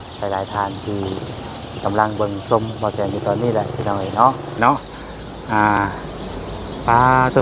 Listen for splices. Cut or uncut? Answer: cut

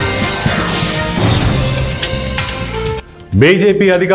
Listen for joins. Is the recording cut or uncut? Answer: cut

